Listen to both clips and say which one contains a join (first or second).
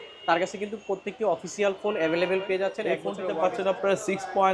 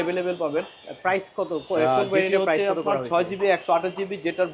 first